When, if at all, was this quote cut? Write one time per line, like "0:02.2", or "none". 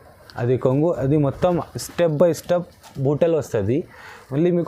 none